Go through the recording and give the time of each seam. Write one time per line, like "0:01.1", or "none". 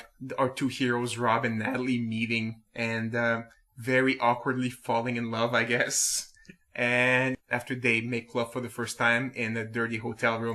0:07.3